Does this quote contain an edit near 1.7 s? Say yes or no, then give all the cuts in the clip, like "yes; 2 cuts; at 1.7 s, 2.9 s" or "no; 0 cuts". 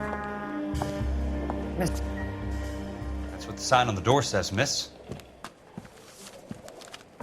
yes; 1 cut; at 1.7 s